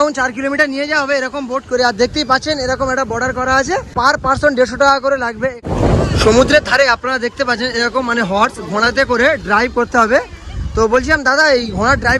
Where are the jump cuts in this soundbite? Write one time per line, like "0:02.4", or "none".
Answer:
0:03.9
0:05.7